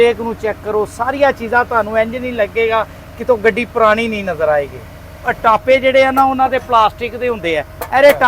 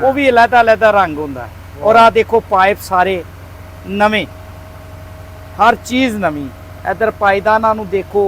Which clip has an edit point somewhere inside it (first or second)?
first